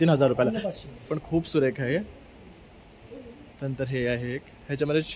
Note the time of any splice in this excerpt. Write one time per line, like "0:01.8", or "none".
0:01.1